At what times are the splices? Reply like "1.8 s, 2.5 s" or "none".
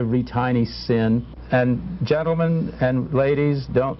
1.4 s